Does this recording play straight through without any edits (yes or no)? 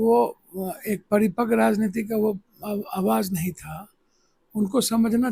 yes